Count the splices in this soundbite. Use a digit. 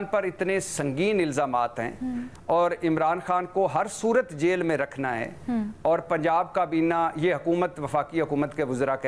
0